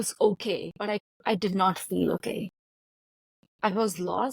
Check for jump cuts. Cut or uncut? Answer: cut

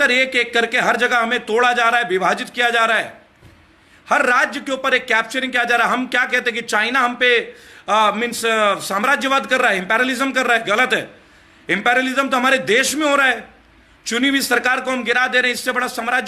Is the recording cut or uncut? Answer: uncut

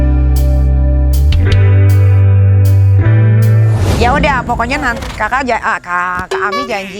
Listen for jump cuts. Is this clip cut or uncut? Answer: cut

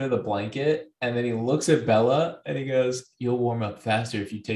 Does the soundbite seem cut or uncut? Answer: uncut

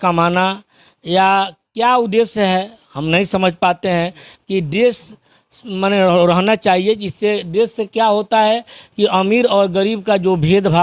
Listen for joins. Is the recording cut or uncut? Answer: uncut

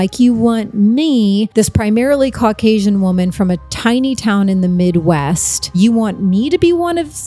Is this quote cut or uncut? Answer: cut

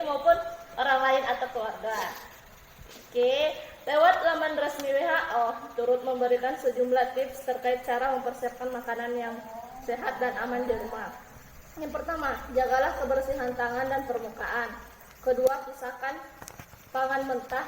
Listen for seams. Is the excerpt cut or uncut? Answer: cut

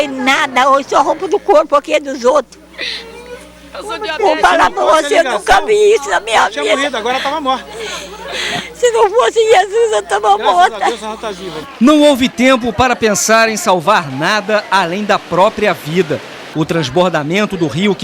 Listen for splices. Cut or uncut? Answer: uncut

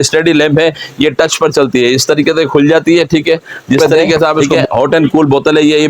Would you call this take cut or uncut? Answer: cut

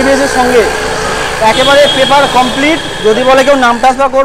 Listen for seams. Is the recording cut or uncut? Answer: uncut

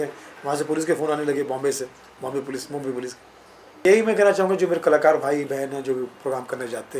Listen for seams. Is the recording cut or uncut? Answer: cut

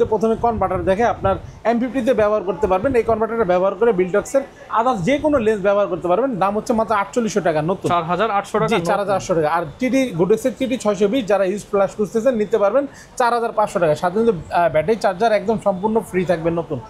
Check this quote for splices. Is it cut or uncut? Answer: uncut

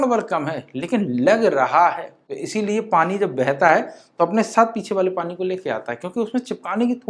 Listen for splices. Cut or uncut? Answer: cut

